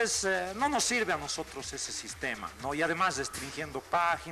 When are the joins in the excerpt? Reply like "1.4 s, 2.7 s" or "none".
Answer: none